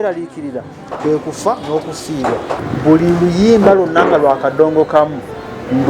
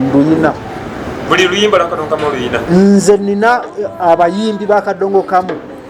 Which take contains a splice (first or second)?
first